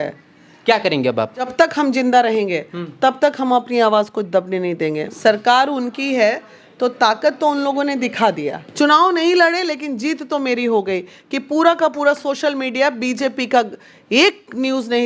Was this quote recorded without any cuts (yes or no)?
no